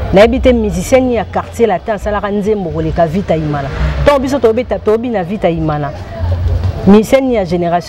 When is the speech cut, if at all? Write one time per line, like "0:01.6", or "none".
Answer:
none